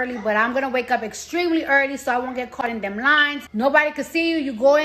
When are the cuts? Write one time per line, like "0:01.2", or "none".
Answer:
0:03.4